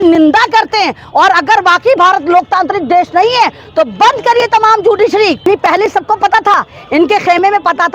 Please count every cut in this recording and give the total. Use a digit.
1